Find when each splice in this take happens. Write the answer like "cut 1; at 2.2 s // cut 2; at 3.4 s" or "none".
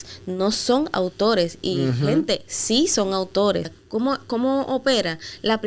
cut 1; at 3.8 s

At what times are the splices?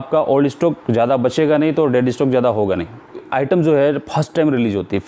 cut 1; at 3.3 s

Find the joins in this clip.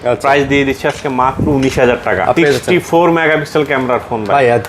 cut 1; at 2.4 s

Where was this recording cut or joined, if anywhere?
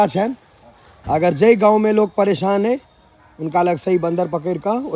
none

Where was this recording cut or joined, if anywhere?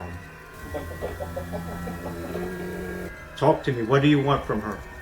cut 1; at 3.1 s

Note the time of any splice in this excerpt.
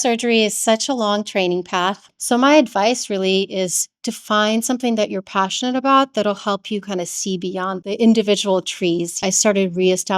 cut 1; at 2.1 s // cut 2; at 7.8 s // cut 3; at 9.2 s

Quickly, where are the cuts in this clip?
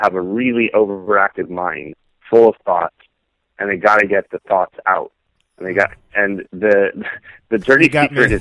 none

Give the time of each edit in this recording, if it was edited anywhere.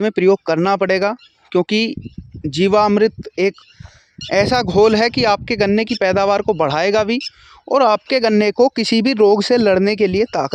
none

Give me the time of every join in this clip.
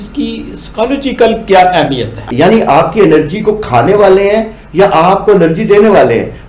cut 1; at 2.2 s

